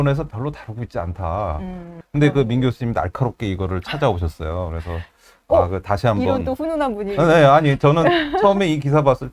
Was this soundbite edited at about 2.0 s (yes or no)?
yes